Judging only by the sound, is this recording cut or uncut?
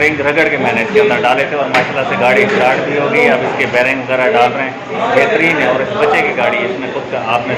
uncut